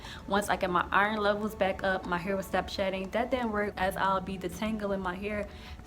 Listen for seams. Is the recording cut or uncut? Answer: cut